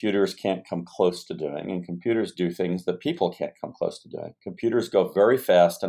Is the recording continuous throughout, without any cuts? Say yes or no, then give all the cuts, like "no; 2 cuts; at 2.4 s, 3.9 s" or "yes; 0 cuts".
yes; 0 cuts